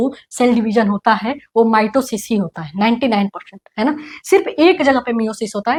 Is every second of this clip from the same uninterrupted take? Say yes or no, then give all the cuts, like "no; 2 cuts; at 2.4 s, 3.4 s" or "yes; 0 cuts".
yes; 0 cuts